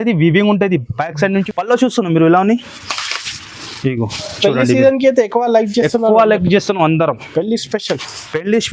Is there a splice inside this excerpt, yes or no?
yes